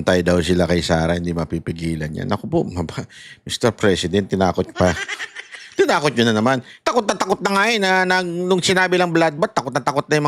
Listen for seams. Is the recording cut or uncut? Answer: uncut